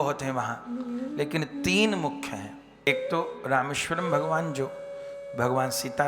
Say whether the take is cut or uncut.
cut